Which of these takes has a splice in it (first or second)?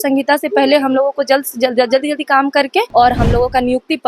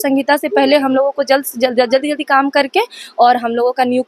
first